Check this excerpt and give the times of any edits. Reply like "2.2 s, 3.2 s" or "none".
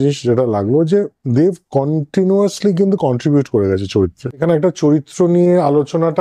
4.4 s

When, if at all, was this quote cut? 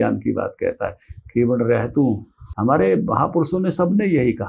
2.4 s

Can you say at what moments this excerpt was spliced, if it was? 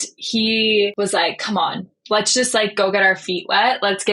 0.9 s

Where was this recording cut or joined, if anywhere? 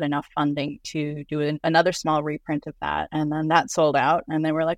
1.6 s, 3.1 s

